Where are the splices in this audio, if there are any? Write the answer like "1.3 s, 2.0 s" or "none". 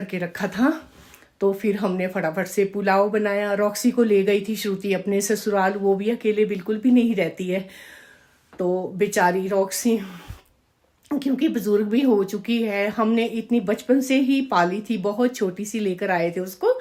none